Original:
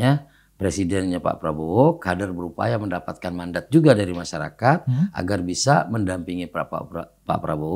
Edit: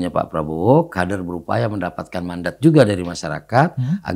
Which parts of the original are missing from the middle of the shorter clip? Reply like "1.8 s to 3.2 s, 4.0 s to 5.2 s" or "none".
none